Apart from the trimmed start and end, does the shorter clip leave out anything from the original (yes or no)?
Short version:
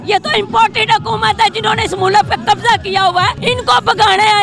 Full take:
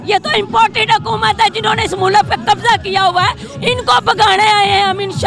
yes